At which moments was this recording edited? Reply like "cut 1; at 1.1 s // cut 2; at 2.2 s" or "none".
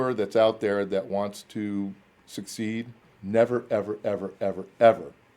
cut 1; at 3.0 s